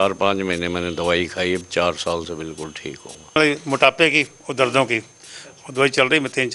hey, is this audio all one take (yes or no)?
no